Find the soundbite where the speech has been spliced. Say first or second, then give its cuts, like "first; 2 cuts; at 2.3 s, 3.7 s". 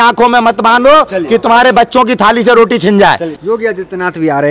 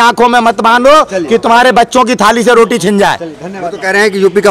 second; 1 cut; at 3.3 s